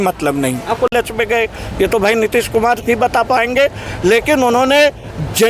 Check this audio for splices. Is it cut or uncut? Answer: cut